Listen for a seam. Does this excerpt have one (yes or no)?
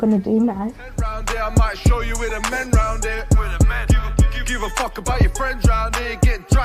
yes